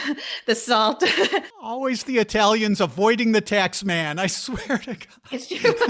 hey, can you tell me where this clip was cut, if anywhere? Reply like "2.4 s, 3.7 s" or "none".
1.7 s

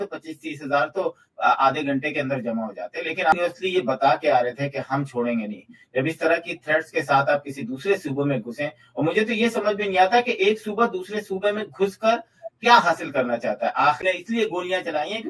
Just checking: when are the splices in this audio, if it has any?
3.3 s, 14.0 s

